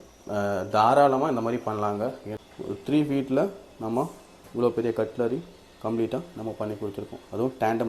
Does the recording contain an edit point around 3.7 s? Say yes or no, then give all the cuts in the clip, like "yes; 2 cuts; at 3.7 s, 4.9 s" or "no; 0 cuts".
no; 1 cut; at 2.3 s